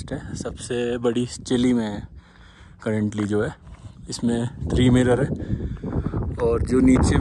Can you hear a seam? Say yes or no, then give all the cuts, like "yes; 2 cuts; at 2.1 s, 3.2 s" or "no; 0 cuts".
no; 0 cuts